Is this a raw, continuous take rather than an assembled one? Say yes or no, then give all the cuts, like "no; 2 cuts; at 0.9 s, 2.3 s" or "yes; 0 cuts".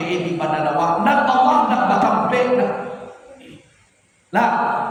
yes; 0 cuts